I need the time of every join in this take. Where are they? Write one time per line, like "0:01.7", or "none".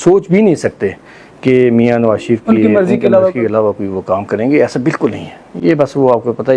none